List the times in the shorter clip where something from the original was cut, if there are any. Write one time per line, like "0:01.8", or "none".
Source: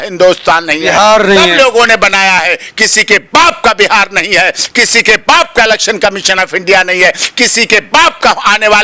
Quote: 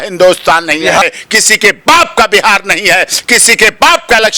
0:01.0